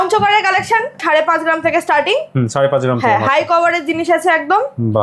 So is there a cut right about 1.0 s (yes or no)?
yes